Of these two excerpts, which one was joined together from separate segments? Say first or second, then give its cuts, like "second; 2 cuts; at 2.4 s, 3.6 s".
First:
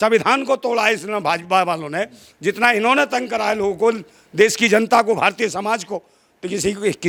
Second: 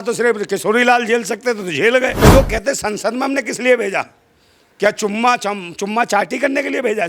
second; 1 cut; at 2.1 s